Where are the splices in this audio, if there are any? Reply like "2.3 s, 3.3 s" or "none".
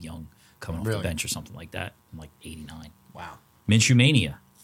3.5 s